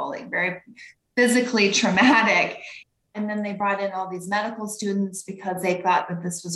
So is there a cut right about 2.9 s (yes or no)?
yes